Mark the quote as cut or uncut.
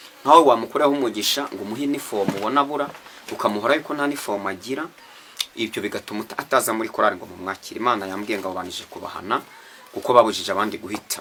uncut